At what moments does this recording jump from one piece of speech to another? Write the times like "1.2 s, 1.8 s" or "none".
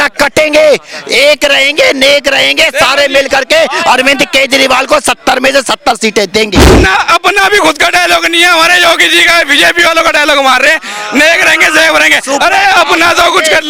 none